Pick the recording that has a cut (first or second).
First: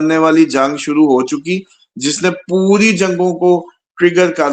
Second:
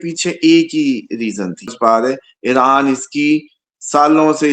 second